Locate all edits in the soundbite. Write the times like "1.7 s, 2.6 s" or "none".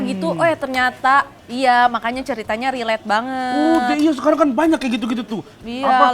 1.4 s